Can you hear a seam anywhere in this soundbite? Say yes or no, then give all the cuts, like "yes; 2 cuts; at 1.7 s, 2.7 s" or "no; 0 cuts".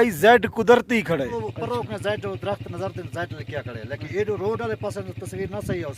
yes; 1 cut; at 1.4 s